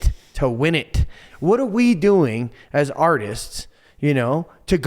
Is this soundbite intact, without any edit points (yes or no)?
no